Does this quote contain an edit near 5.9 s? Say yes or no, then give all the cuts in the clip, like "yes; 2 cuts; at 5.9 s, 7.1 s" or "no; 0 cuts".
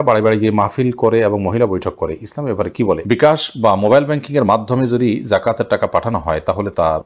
no; 1 cut; at 3.0 s